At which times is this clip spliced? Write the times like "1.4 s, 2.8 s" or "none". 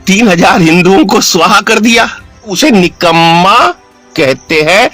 2.5 s